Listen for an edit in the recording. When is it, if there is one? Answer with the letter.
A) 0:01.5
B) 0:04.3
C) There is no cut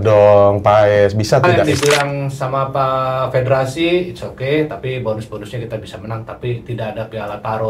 A